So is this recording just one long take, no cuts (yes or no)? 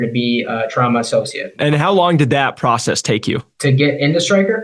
no